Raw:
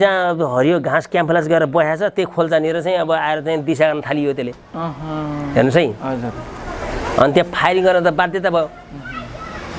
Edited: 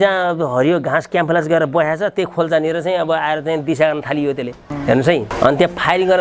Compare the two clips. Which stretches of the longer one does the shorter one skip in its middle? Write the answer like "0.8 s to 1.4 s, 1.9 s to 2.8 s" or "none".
4.7 s to 5.3 s, 6.0 s to 7.1 s